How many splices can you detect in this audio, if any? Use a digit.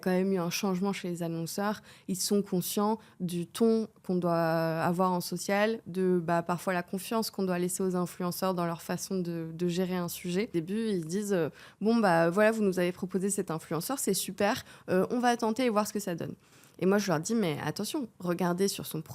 1